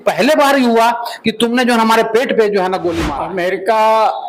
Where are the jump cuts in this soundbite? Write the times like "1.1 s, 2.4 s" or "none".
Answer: 3.1 s